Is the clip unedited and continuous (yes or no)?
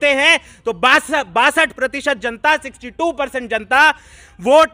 yes